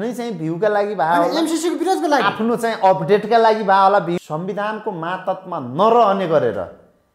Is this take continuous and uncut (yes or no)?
no